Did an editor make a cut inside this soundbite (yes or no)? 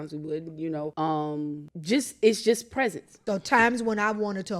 yes